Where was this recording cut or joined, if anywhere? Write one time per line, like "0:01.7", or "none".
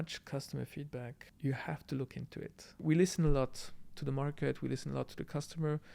0:01.2
0:02.8